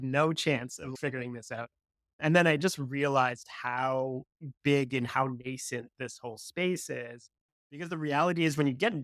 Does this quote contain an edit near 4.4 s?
no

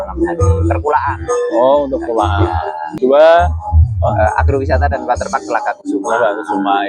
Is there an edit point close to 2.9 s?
yes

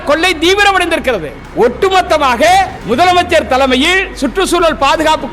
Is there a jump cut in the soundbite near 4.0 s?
no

